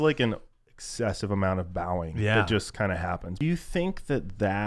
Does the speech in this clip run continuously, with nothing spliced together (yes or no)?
no